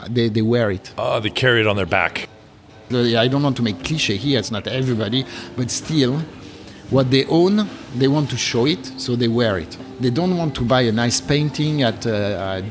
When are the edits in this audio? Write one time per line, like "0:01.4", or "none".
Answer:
0:09.8
0:12.0